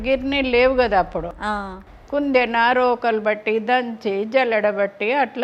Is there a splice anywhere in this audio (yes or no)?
no